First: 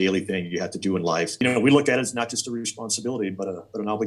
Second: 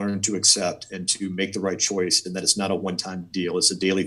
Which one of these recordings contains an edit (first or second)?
first